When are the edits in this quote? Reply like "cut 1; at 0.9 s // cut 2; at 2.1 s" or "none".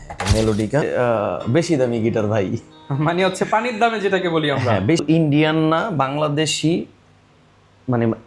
cut 1; at 0.9 s // cut 2; at 5.0 s